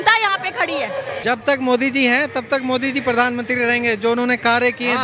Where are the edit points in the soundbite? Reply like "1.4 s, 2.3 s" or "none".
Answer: 1.2 s

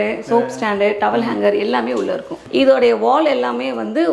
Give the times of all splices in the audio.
2.3 s

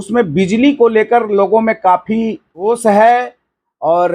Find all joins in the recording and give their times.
2.6 s

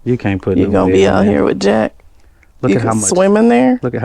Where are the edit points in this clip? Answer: none

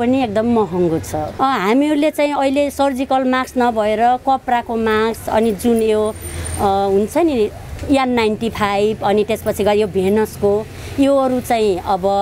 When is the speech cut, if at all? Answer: 1.3 s

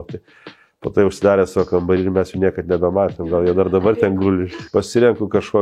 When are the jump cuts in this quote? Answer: 4.5 s

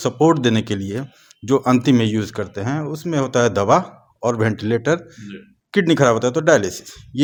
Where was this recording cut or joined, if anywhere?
none

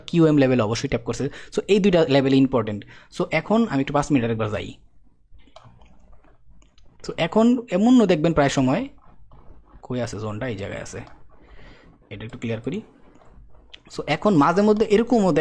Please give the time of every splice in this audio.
none

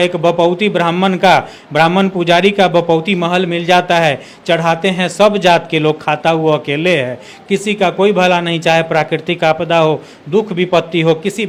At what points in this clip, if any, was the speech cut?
none

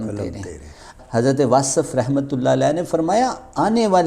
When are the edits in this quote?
0.9 s

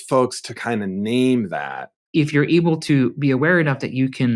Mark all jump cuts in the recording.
2.0 s

